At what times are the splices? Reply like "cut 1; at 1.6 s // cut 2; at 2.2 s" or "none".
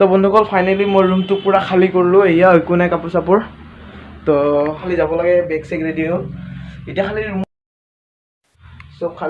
cut 1; at 4.8 s